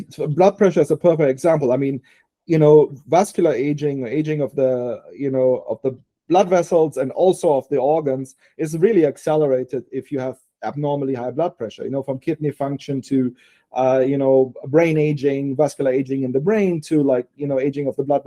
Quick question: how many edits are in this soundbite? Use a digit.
0